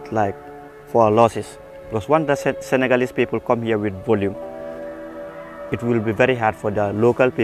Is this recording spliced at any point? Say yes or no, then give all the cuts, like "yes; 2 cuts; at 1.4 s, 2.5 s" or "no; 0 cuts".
no; 0 cuts